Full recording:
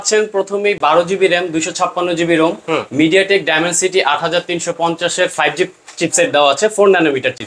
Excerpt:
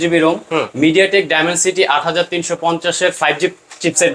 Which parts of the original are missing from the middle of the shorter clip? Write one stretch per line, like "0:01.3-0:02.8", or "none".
none